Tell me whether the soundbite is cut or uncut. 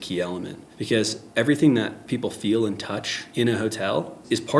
uncut